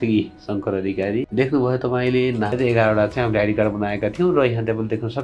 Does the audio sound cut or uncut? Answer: cut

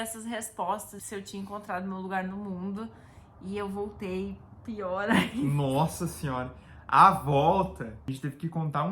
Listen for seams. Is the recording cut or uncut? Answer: cut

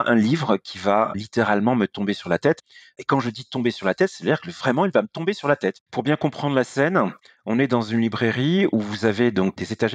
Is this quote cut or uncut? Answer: cut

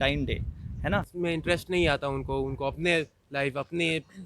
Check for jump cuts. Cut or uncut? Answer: cut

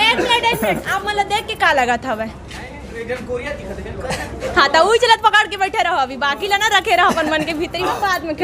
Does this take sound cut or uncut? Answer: uncut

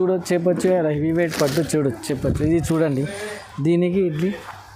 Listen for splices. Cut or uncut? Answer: uncut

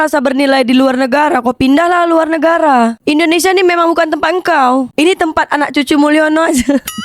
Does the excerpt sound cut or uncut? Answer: uncut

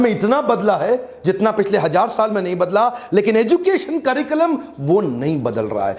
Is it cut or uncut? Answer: uncut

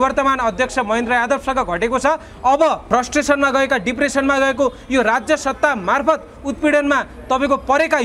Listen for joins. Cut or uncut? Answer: cut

